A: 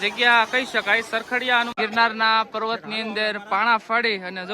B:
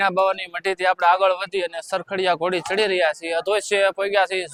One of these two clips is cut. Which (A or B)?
A